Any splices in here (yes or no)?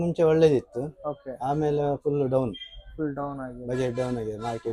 no